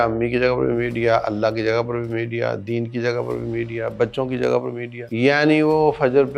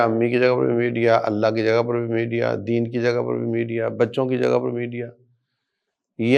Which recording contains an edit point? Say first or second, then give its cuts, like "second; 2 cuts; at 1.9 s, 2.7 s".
first; 1 cut; at 4.9 s